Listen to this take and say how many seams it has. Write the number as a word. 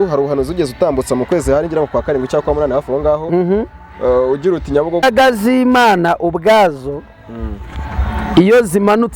one